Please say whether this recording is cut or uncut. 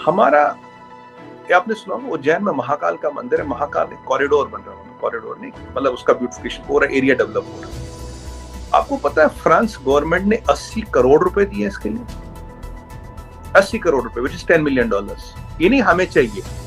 uncut